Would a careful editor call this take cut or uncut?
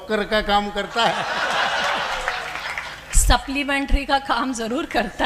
uncut